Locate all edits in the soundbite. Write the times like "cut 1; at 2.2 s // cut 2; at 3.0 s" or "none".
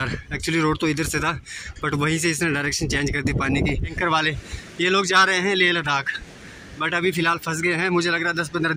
cut 1; at 3.9 s